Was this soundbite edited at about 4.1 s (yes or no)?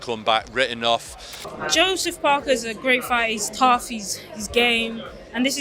no